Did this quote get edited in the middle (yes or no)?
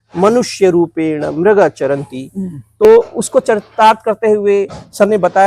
no